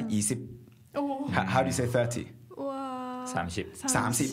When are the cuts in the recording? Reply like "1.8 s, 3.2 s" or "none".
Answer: none

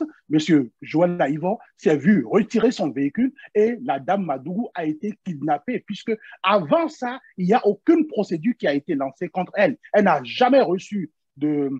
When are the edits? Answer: none

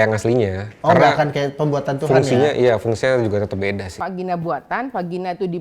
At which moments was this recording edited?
3.9 s

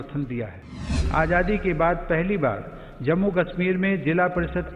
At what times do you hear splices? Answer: 1.0 s

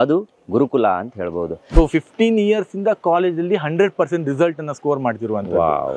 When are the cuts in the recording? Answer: 1.6 s

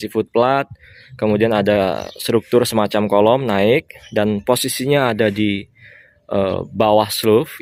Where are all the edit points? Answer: none

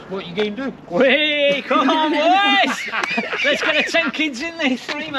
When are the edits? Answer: none

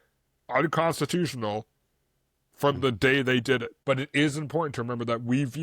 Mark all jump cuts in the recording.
3.7 s

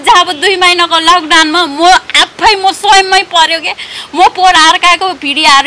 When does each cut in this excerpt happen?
none

